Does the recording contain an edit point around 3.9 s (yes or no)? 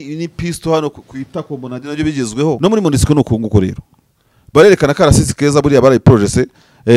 no